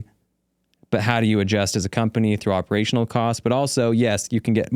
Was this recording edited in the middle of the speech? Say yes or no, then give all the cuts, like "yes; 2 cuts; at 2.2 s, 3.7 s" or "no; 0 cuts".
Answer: no; 0 cuts